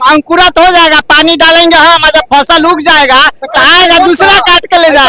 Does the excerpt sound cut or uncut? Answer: uncut